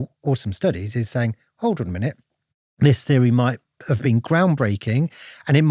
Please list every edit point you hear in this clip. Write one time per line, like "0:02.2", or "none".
0:04.0